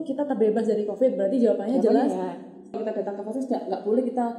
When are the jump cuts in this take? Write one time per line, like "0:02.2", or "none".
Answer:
0:02.8